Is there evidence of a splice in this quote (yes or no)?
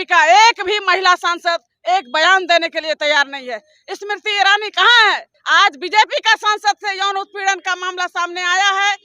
yes